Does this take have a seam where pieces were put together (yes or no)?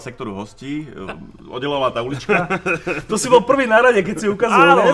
no